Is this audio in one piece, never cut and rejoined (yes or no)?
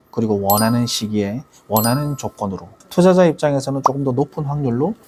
no